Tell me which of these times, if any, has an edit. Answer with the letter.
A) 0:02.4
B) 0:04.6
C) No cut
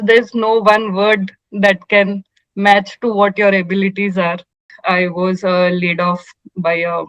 B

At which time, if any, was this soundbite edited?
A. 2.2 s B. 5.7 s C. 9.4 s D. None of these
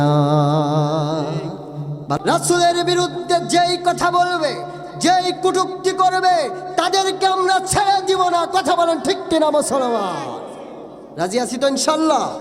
A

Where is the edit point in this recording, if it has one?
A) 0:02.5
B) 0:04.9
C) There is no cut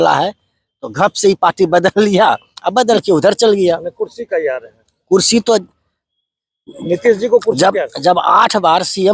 C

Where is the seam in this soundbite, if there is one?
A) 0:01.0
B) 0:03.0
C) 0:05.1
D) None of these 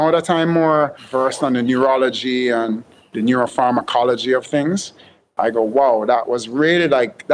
A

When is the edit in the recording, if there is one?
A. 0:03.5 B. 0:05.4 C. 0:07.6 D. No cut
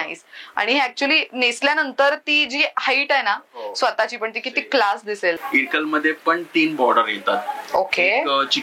B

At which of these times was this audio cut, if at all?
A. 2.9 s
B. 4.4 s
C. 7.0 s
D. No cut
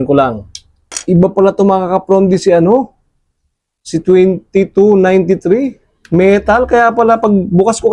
D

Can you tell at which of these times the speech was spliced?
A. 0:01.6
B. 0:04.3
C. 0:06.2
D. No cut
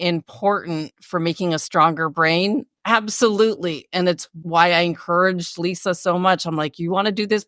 B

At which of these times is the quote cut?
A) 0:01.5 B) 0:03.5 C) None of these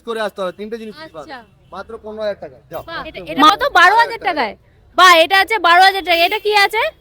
B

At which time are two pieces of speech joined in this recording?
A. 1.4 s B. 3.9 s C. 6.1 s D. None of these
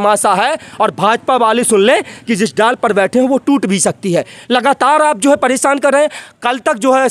D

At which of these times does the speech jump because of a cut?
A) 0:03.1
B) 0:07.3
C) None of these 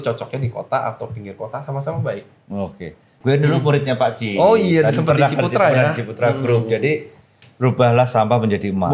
A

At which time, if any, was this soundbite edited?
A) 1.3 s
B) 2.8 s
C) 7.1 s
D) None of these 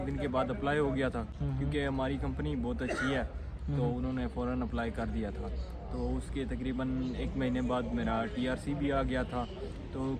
D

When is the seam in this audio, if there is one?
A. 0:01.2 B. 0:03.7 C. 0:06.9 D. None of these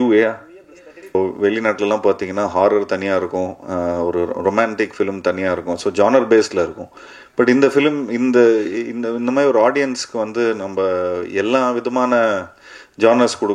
A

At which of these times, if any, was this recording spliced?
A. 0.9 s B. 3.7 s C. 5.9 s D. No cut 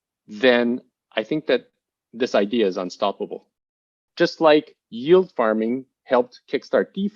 B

